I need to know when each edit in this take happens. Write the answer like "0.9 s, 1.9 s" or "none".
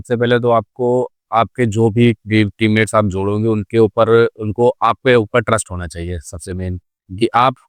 none